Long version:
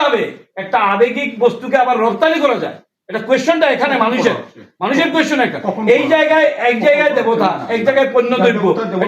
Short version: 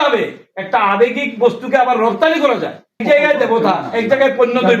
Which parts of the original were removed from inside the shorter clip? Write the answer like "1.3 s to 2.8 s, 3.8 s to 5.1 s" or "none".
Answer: 3.0 s to 6.8 s

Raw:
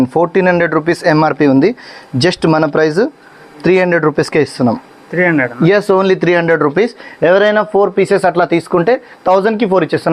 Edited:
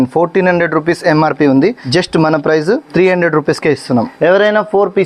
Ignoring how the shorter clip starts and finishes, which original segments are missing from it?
1.8 s to 2.1 s, 3.2 s to 3.6 s, 4.8 s to 7.1 s

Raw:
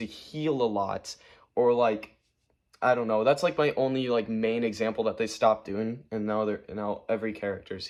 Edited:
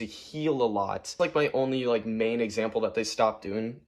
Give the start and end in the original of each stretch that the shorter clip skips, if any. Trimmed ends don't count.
1.2 s to 3.4 s

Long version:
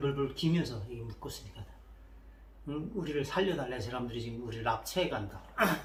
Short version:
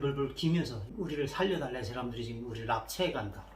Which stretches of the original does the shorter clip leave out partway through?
0.9 s to 2.9 s

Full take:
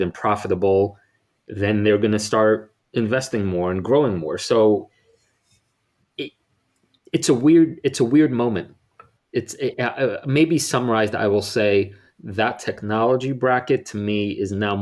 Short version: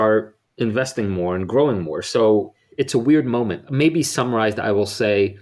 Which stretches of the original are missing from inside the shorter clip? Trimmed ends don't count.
5.1 s to 7.8 s, 8.7 s to 10.2 s

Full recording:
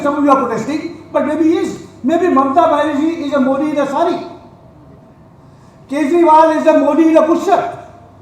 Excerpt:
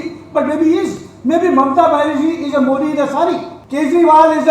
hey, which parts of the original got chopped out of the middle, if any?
4.3 s to 5.7 s

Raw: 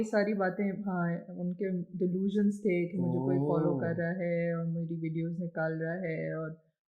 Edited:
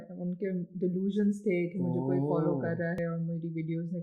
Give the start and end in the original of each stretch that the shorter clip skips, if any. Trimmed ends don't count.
4.2 s to 4.4 s

